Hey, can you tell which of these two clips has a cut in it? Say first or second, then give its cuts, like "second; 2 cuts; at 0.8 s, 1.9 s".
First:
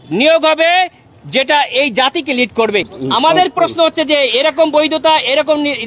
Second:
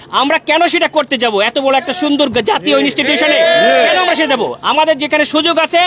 first; 1 cut; at 2.9 s